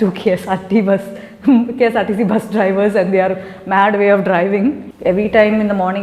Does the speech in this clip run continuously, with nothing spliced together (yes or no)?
no